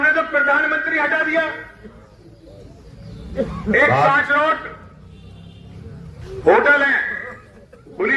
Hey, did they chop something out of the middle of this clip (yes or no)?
no